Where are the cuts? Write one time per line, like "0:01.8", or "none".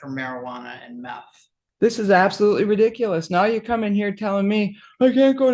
0:01.6